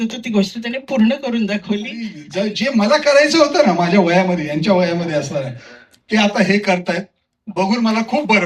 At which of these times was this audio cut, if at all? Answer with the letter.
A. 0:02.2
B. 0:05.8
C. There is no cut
A